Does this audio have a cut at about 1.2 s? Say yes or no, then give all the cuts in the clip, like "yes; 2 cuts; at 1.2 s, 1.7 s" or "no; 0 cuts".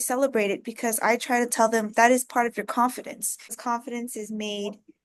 no; 1 cut; at 3.6 s